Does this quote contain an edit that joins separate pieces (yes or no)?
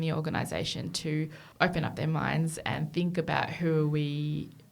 yes